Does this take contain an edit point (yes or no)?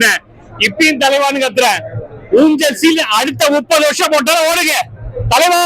no